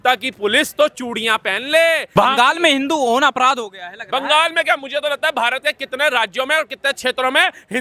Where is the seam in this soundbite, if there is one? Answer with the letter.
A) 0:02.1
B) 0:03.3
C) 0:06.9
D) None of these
A